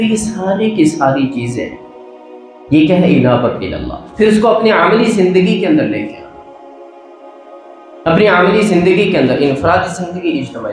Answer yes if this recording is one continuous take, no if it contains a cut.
yes